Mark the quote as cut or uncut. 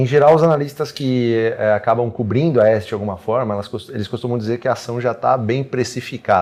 uncut